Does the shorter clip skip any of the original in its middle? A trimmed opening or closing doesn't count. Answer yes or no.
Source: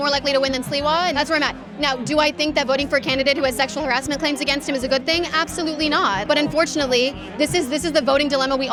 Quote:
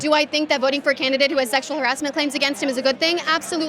no